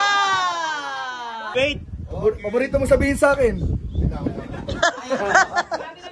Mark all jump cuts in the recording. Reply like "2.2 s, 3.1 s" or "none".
1.5 s

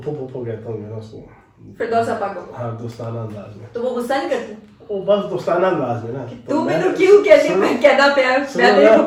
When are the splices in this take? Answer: none

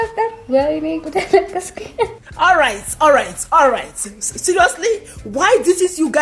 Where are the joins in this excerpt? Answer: 2.2 s

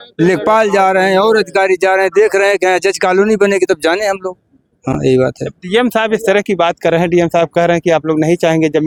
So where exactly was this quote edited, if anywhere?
none

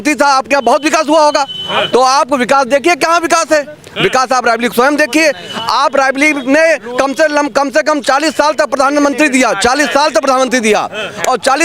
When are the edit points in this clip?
none

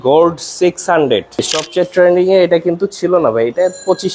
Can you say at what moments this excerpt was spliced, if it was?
1.6 s

